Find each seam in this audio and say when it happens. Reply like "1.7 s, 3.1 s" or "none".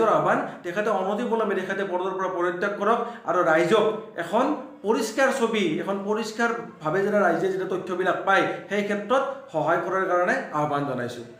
none